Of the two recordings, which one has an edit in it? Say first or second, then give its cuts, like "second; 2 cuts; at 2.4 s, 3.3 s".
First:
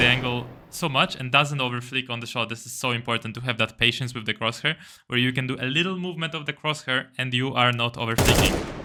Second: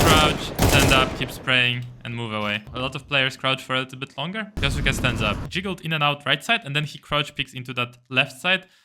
second; 3 cuts; at 2.7 s, 4.5 s, 5.4 s